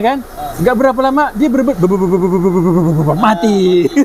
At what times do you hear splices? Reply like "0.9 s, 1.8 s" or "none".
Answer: none

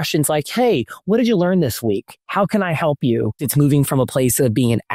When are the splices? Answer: 3.4 s

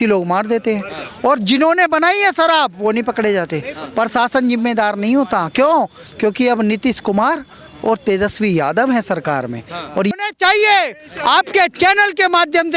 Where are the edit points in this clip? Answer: none

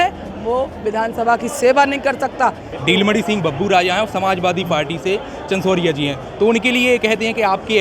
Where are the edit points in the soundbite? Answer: 2.7 s

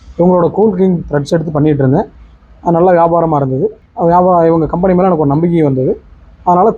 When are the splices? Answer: 3.8 s

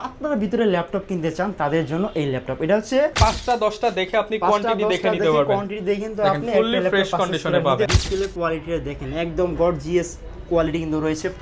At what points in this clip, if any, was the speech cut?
3.1 s, 7.9 s

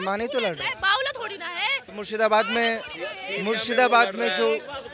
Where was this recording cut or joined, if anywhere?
none

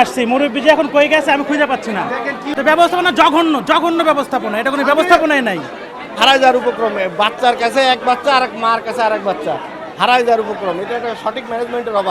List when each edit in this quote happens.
2.5 s, 6.0 s

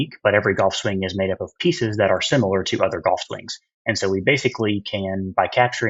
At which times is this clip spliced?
none

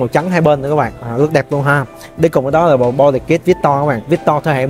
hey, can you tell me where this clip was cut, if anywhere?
none

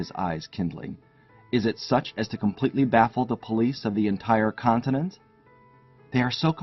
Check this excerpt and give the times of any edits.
2.6 s

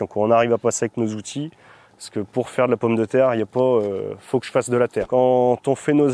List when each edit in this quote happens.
5.0 s

